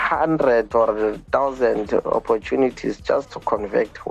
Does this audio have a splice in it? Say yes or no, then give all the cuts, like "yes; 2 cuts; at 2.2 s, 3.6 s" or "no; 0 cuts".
no; 0 cuts